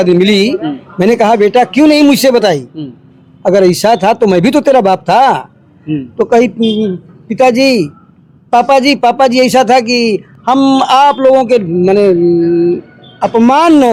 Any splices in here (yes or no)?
no